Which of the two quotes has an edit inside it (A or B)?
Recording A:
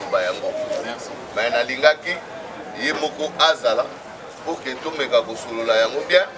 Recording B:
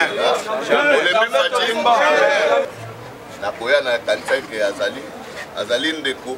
B